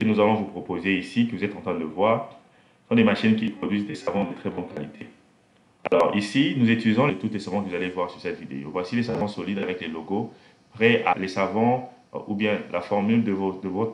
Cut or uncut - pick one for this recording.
cut